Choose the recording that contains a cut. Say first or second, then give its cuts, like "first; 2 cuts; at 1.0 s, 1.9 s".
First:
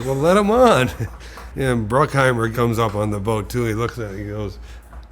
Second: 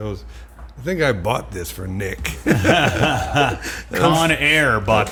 first; 1 cut; at 2.5 s